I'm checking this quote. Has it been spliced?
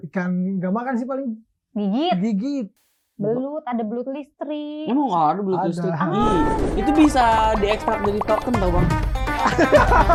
no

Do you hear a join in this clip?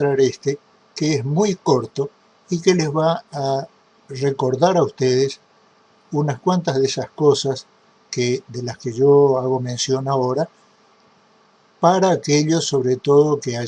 no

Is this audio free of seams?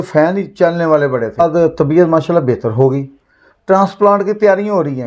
no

